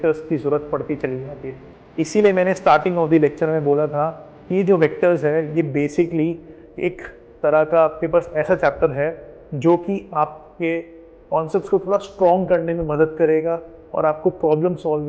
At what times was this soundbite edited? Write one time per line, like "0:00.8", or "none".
none